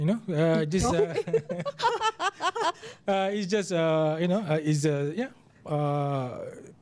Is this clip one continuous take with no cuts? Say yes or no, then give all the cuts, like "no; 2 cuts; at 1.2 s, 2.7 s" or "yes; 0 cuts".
yes; 0 cuts